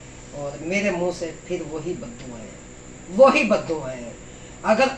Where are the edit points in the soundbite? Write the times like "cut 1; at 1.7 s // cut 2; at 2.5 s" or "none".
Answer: none